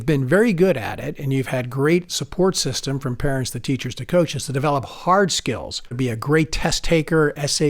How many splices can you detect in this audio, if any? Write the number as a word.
one